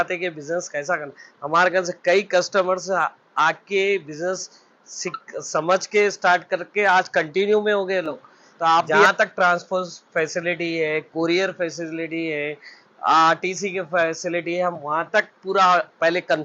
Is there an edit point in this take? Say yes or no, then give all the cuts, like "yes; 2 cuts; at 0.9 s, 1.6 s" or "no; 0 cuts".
yes; 1 cut; at 9.0 s